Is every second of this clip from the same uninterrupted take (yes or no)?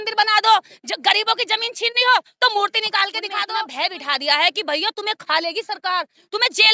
no